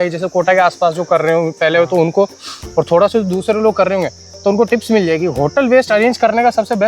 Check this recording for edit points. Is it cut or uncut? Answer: uncut